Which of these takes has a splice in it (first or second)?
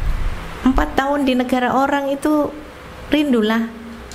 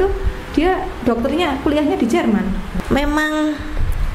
second